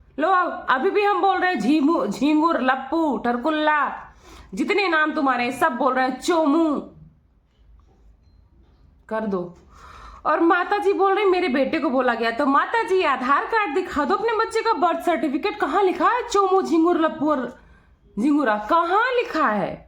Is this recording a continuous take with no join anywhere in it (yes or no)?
yes